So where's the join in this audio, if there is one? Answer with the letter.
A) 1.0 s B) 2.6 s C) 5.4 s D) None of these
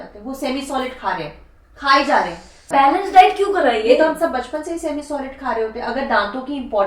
B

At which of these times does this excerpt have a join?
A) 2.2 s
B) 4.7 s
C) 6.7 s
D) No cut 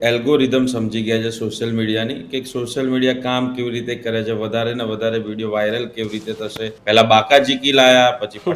C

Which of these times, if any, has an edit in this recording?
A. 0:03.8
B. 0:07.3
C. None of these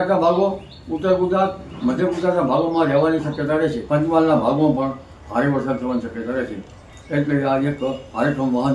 A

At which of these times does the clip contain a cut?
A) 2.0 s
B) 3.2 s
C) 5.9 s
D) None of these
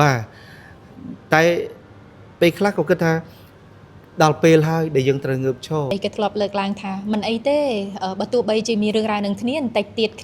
C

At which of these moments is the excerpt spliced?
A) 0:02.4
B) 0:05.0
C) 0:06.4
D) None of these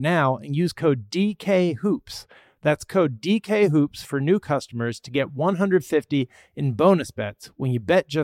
D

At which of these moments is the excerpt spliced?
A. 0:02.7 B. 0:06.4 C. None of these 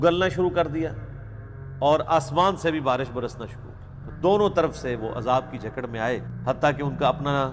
B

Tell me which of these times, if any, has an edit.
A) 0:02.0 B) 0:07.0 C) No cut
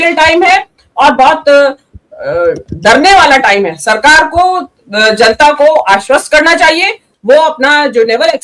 B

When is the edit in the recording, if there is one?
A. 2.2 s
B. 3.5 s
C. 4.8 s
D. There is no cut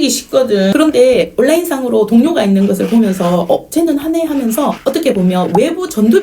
C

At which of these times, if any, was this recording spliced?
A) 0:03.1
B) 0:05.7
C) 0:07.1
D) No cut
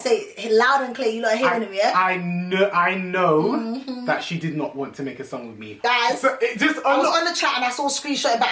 B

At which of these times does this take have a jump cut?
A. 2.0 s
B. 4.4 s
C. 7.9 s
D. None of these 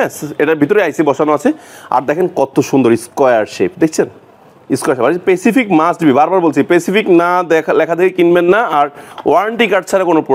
D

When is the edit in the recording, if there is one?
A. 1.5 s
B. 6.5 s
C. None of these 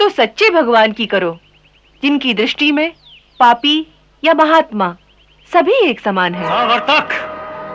B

